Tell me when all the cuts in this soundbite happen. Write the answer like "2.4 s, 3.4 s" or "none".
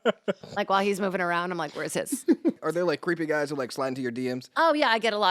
2.6 s